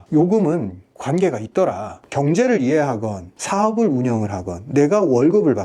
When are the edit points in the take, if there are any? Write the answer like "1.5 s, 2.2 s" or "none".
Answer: 1.9 s